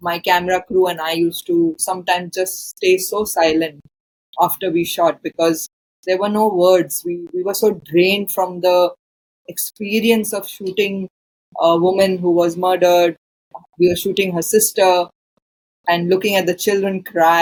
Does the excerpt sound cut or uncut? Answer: uncut